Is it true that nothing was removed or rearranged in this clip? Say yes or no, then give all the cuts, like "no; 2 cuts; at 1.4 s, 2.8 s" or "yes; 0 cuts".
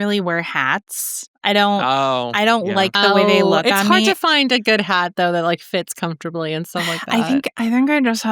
yes; 0 cuts